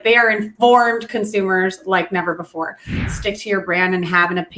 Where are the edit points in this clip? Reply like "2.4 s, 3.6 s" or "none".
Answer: 3.1 s